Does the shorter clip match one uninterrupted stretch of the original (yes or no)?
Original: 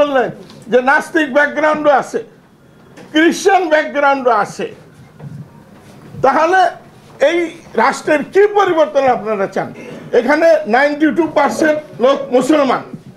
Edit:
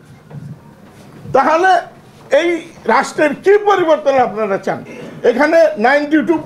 yes